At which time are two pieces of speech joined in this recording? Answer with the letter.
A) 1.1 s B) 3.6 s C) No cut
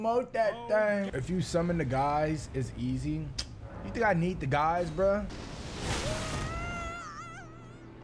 A